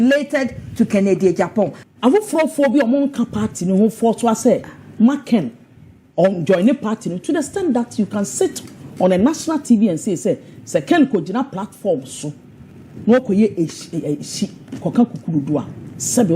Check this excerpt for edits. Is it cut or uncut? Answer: cut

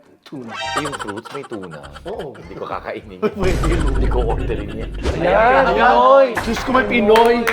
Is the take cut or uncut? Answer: cut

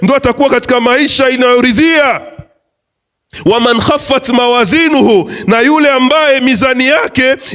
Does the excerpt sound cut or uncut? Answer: uncut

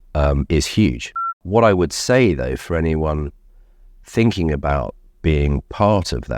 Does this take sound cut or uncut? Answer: cut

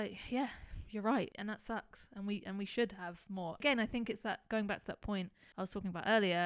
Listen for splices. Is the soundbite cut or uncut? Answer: cut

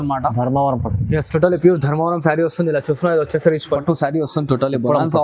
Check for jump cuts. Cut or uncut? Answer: cut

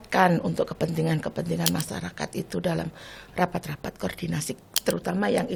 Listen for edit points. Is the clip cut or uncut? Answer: uncut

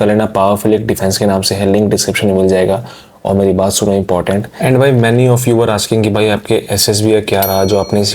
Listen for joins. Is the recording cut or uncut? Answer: cut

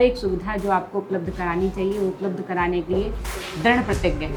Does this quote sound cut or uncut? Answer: uncut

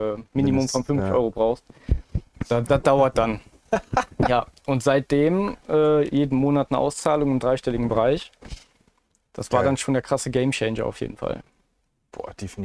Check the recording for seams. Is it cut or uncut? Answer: uncut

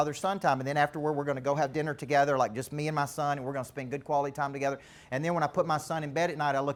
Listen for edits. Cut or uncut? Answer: uncut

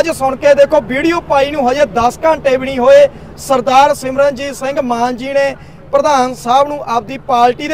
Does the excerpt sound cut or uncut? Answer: uncut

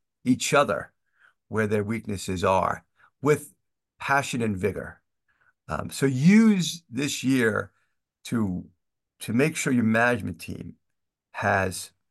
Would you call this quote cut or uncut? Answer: uncut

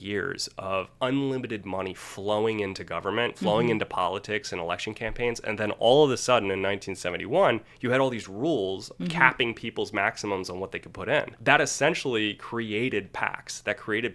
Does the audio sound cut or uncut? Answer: uncut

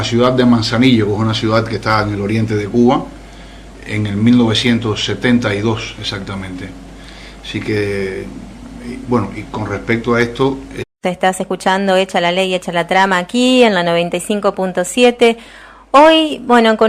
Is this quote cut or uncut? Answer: uncut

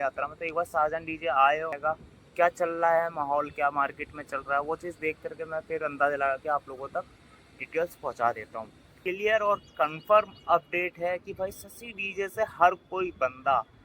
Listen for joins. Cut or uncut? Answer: cut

